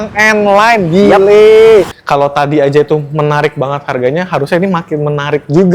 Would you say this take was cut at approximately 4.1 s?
no; 1 cut; at 2.0 s

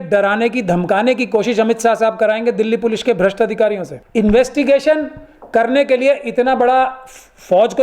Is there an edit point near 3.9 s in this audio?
yes; 1 cut; at 3.9 s

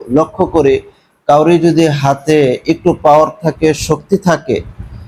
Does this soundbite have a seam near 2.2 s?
no; 0 cuts

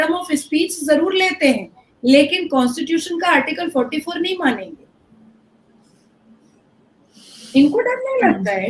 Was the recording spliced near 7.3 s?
no; 0 cuts

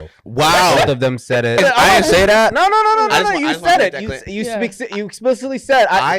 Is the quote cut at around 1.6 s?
yes; 1 cut; at 1.6 s

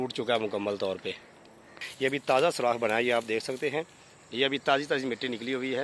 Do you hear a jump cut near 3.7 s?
no; 1 cut; at 1.9 s

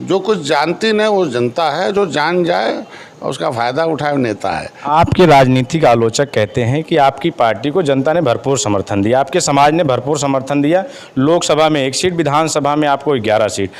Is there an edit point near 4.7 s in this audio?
yes; 1 cut; at 4.7 s

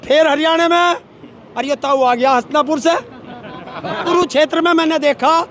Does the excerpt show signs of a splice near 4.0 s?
yes; 1 cut; at 4.0 s

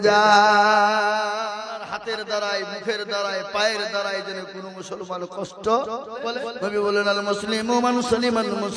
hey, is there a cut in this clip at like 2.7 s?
no; 2 cuts; at 1.4 s, 6.3 s

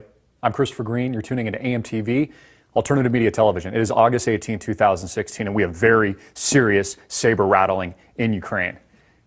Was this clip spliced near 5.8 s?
yes; 1 cut; at 5.8 s

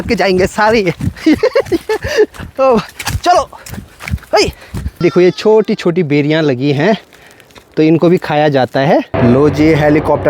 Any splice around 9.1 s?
yes; 2 cuts; at 5.0 s, 9.1 s

